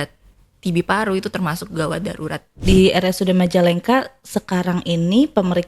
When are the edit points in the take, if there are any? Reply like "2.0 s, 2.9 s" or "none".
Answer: 2.5 s